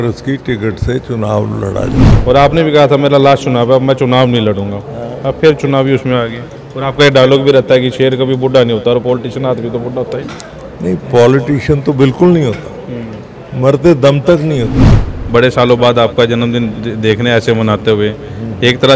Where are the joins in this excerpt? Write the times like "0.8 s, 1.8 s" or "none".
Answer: 2.1 s, 15.1 s